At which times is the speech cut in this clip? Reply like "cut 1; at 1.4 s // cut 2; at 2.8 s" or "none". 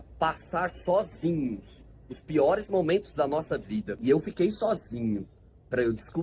cut 1; at 3.9 s

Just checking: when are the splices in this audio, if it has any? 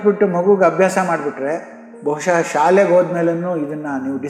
none

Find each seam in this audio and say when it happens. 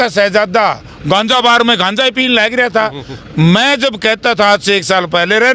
none

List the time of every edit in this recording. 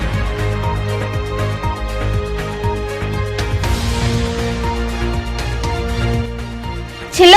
cut 1; at 3.5 s

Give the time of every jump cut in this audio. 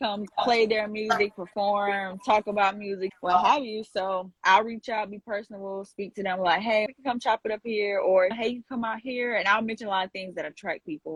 none

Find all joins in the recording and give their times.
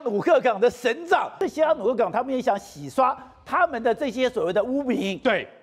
cut 1; at 1.3 s

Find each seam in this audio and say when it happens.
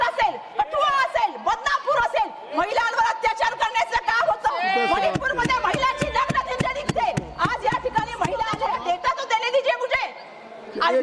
cut 1; at 8.6 s

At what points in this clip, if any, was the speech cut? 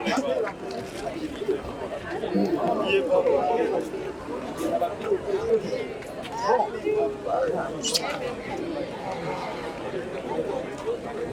none

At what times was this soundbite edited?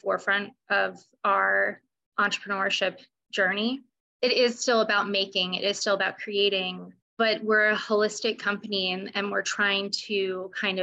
none

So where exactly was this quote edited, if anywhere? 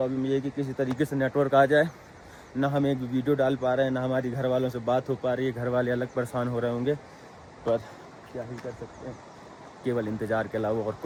none

